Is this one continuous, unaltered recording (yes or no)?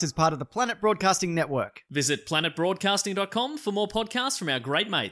yes